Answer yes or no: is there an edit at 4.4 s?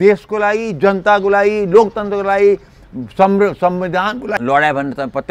yes